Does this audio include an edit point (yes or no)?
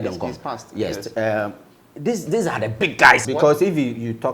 yes